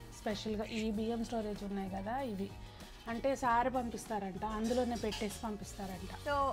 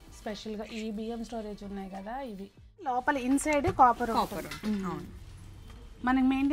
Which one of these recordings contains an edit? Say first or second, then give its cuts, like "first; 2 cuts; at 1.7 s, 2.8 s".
second; 1 cut; at 2.9 s